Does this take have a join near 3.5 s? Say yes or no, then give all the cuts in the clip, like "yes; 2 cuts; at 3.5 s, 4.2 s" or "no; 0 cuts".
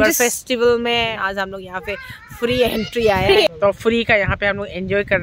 yes; 2 cuts; at 1.1 s, 3.5 s